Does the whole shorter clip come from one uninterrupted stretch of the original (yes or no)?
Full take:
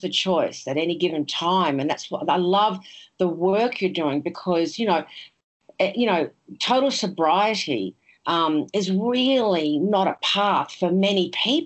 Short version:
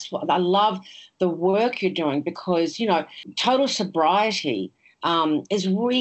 no